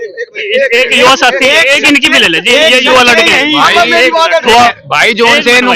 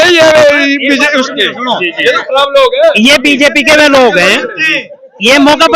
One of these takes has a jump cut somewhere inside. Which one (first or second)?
first